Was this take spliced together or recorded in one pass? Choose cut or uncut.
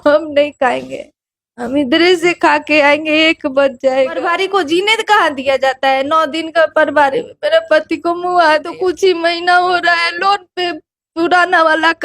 cut